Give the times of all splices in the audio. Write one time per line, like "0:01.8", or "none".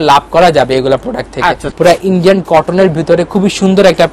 0:01.7